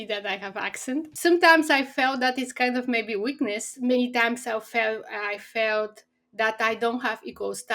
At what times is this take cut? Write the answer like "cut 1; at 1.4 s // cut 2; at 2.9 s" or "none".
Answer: cut 1; at 1.1 s // cut 2; at 3.7 s